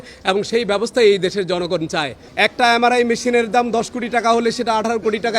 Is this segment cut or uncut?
cut